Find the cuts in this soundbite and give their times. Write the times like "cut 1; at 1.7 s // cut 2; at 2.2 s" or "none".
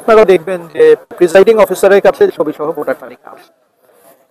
cut 1; at 1.2 s